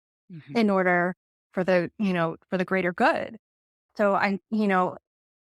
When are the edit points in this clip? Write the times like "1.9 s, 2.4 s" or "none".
none